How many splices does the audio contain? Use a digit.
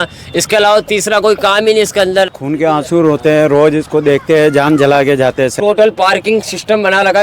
2